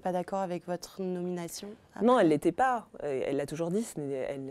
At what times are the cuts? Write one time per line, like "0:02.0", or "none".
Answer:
none